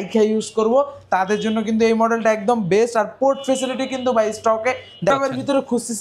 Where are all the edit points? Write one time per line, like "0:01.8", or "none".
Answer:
0:05.1